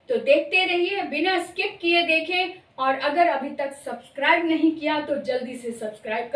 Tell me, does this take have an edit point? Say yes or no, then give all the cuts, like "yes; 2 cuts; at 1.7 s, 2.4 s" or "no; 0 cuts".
no; 0 cuts